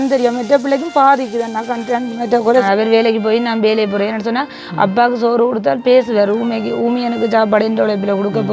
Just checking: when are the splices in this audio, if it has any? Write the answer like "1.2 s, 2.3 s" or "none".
2.5 s